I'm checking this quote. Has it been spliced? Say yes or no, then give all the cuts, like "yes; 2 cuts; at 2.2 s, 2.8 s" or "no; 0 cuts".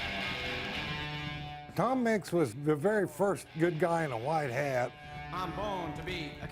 yes; 3 cuts; at 1.6 s, 2.6 s, 5.1 s